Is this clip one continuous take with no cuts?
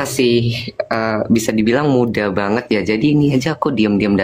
yes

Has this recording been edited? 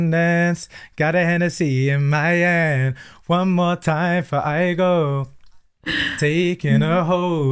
no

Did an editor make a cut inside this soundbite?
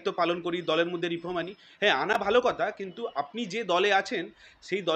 no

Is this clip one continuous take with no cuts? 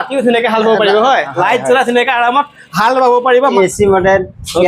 no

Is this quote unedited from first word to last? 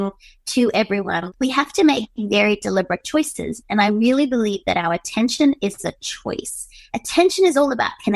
no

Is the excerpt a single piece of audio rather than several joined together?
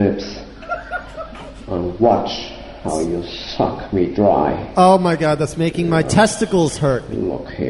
no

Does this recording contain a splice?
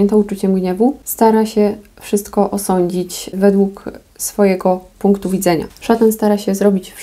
yes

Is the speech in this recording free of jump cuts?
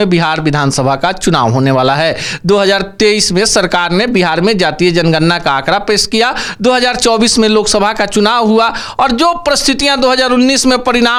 yes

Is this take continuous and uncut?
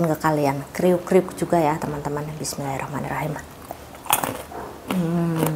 yes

